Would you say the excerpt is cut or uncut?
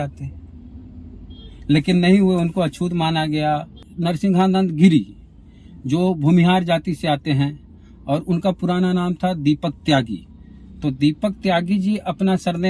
cut